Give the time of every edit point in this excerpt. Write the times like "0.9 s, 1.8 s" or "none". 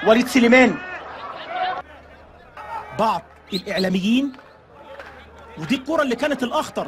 1.8 s